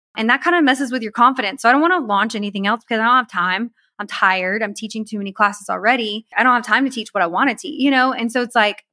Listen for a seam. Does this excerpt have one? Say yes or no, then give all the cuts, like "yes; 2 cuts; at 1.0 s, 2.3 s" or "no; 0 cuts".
yes; 1 cut; at 6.3 s